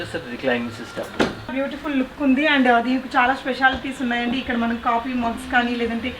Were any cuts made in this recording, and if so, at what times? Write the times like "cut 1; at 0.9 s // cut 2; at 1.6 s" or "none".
cut 1; at 1.5 s